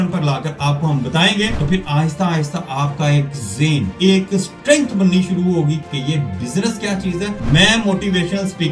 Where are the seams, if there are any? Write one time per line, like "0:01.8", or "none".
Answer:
0:01.6
0:03.9
0:05.8
0:07.4